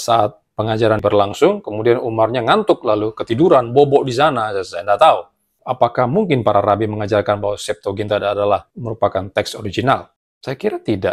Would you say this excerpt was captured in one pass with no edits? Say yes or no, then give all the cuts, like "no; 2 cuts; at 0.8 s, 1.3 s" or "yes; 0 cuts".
no; 1 cut; at 1.0 s